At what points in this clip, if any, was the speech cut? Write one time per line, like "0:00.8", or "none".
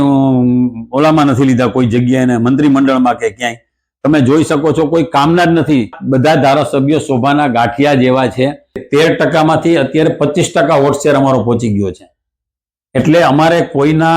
0:06.0
0:08.8